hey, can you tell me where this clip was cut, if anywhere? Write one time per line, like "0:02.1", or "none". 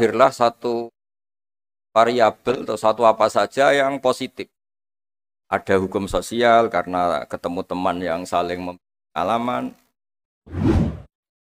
0:10.5